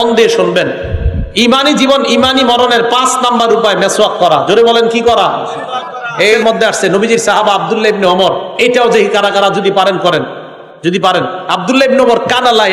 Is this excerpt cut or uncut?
cut